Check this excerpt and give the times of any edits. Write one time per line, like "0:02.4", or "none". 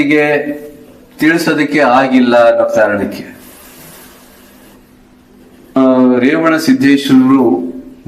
0:05.8